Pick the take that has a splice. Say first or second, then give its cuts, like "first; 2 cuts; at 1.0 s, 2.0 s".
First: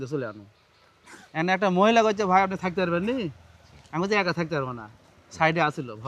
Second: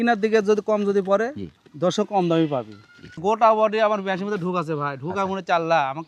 second; 1 cut; at 3.2 s